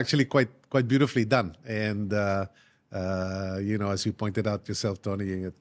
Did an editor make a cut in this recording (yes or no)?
no